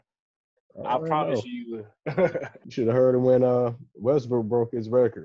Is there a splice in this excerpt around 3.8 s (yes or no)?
no